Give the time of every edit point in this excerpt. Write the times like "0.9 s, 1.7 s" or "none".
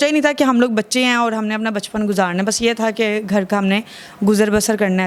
none